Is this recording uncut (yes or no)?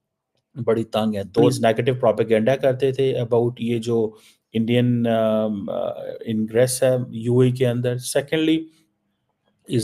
no